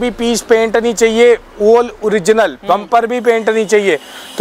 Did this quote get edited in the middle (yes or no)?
no